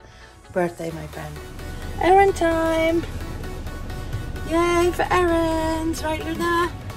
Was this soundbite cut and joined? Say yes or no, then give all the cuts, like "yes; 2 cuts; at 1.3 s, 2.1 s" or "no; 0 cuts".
no; 0 cuts